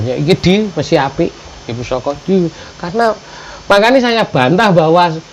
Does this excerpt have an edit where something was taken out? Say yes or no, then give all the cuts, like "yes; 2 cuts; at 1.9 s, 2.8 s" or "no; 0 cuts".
no; 0 cuts